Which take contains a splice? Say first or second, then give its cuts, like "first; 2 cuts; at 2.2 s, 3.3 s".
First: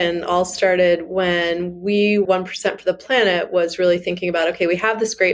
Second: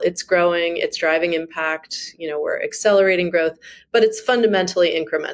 first; 1 cut; at 2.3 s